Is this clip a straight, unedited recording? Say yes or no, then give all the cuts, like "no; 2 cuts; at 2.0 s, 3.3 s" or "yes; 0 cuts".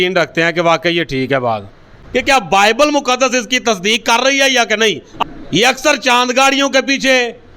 no; 2 cuts; at 2.0 s, 5.1 s